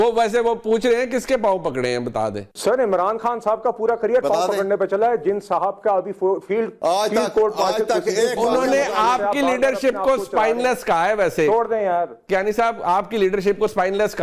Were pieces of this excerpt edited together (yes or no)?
yes